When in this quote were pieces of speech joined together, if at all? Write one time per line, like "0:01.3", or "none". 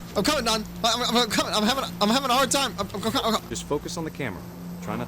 0:03.5